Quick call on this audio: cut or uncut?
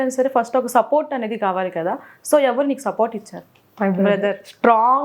uncut